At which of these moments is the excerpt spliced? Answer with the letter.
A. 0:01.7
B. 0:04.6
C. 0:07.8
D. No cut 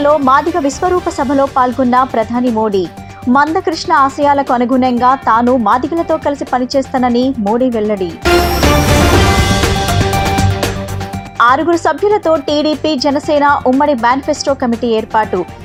D